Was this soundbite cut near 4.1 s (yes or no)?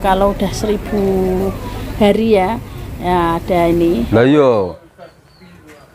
yes